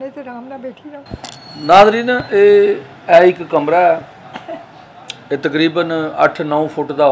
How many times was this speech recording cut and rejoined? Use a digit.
1